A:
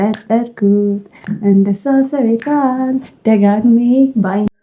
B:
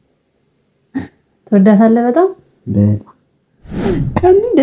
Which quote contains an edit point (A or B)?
B